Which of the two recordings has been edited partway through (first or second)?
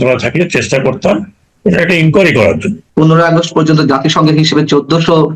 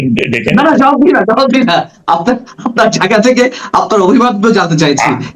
first